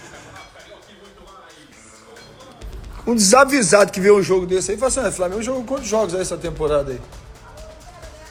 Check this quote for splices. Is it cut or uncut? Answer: uncut